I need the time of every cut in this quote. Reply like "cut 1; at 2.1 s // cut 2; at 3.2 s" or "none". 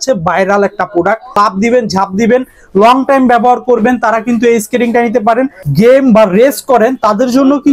cut 1; at 1.4 s // cut 2; at 5.6 s